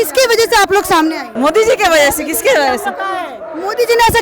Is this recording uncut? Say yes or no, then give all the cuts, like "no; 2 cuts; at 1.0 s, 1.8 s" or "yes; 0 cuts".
no; 1 cut; at 1.3 s